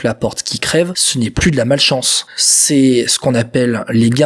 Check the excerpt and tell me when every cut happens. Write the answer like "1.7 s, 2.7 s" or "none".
1.0 s